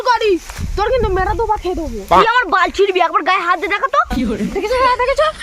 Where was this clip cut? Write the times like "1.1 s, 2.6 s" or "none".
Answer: 1.9 s, 4.3 s